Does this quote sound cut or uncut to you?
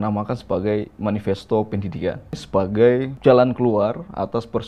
cut